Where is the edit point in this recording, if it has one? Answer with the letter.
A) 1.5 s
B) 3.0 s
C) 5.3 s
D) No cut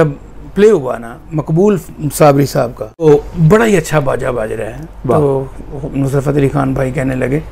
B